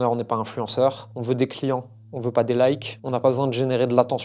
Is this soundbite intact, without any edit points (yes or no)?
no